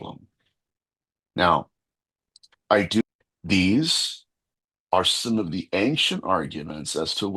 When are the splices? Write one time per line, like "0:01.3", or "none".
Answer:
0:03.0